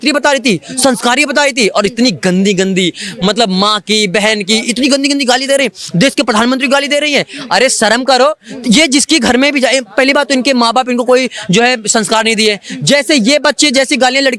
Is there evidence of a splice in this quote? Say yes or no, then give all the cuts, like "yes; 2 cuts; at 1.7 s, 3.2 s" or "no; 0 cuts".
no; 0 cuts